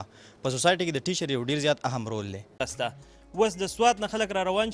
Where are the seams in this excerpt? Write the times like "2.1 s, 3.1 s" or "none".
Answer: 2.7 s